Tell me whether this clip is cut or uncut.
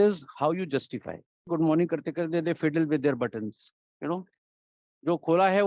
cut